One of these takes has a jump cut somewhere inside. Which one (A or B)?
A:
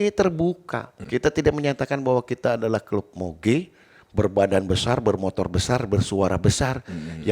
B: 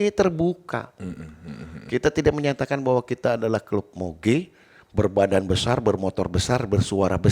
A